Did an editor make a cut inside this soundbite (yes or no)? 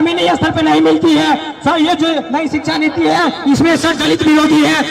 no